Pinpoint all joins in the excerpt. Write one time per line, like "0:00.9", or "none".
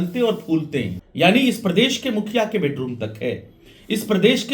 0:00.9